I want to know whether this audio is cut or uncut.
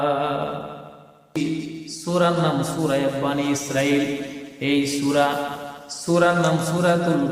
cut